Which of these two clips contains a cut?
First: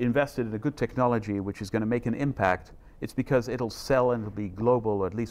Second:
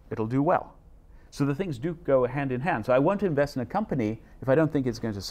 second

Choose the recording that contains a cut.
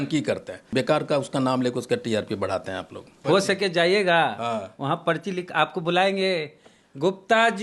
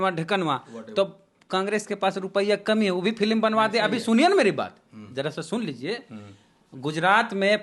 first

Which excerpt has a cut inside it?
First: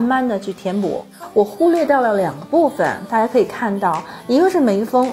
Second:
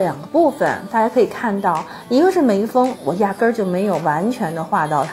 first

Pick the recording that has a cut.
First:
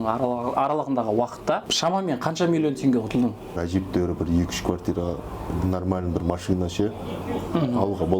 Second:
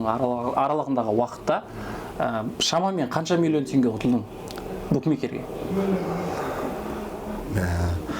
first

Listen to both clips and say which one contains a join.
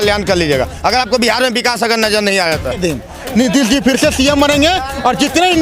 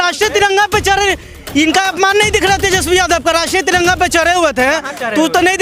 first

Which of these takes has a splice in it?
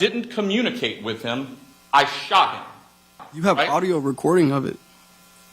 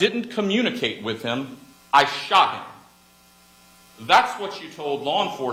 first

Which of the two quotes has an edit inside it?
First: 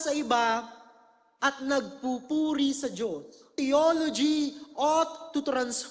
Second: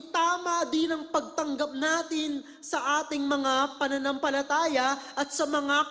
first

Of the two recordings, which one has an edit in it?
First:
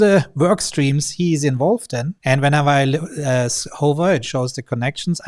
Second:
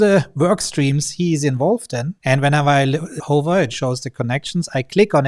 second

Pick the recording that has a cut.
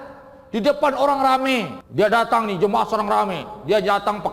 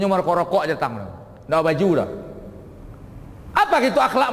first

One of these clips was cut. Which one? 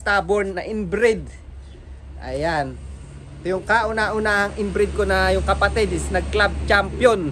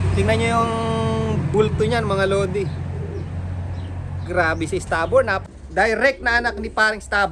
second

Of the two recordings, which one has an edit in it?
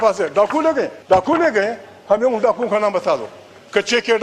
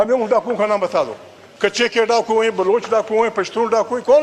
first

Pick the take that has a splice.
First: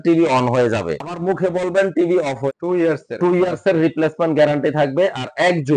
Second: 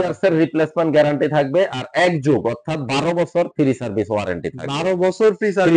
first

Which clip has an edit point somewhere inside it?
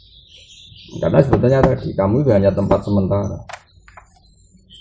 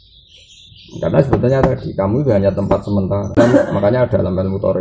second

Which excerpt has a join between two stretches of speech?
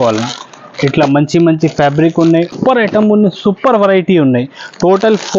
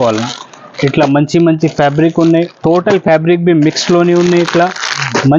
first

